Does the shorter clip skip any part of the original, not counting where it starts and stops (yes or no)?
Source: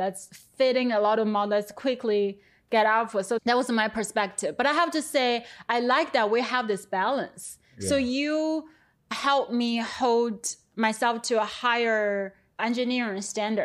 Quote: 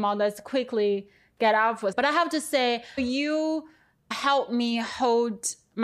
yes